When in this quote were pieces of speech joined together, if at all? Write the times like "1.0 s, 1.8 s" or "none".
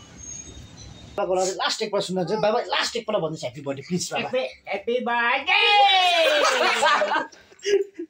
1.2 s